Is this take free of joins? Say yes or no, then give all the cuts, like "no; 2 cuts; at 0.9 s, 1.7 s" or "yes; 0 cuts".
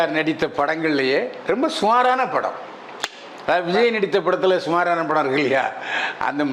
yes; 0 cuts